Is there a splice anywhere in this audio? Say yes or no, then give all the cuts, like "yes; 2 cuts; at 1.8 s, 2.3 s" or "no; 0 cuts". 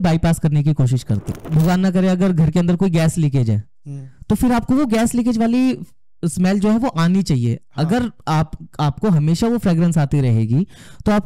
yes; 1 cut; at 1.3 s